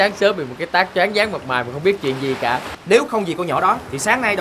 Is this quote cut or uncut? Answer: cut